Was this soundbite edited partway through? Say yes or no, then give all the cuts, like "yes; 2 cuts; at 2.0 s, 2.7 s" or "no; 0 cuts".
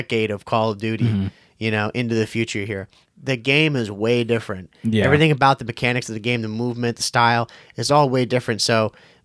no; 0 cuts